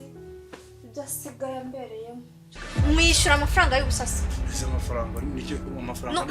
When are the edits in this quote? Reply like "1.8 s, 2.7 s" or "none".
2.4 s